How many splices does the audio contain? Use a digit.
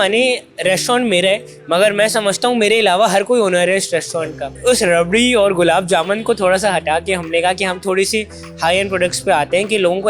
1